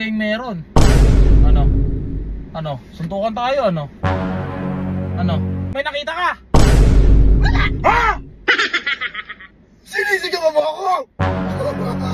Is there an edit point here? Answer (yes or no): yes